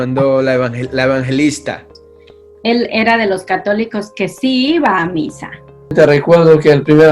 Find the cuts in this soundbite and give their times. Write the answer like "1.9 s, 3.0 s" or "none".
2.0 s, 5.9 s

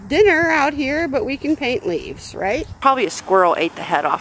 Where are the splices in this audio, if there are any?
2.7 s

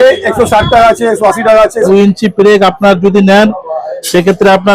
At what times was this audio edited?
1.9 s

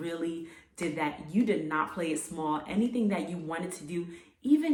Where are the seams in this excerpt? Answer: none

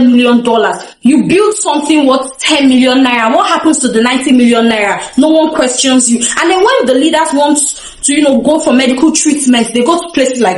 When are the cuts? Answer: none

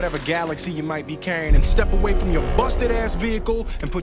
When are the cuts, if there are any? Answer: none

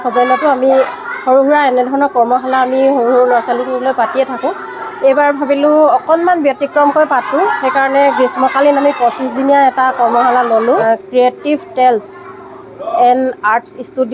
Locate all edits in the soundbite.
10.8 s

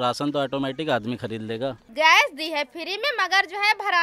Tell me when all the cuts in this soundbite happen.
1.8 s

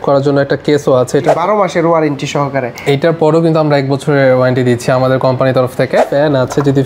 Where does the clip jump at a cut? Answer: 1.4 s, 6.1 s

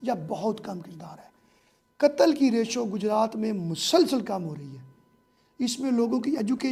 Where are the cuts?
none

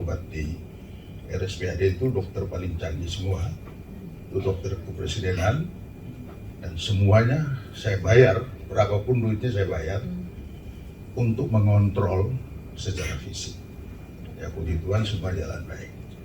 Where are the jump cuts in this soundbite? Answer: none

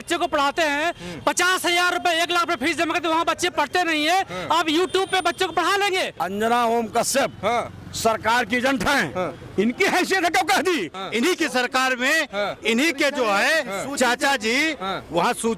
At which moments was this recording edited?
6.2 s, 11.0 s

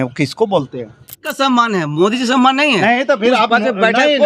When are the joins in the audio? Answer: 1.3 s

